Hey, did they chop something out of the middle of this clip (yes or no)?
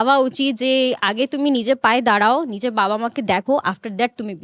no